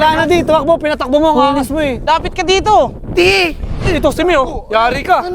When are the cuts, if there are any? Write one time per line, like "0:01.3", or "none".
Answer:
0:02.0